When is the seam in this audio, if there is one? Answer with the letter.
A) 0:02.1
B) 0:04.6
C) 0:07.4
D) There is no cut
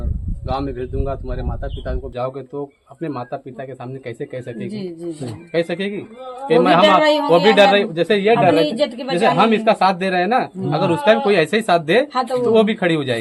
A